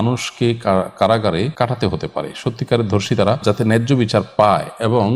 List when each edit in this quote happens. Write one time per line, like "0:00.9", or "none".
0:01.5
0:03.4